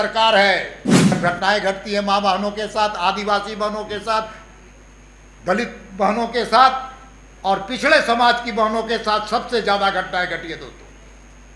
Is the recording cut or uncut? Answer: cut